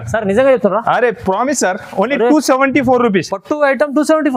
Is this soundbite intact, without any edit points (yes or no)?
yes